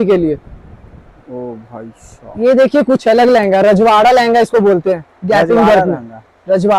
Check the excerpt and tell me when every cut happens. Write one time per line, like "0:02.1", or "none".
0:02.1